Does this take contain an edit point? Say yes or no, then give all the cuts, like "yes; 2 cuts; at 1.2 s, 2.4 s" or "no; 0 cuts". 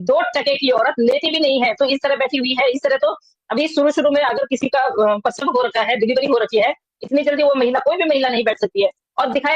no; 0 cuts